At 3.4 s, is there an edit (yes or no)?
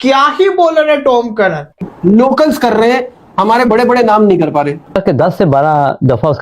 no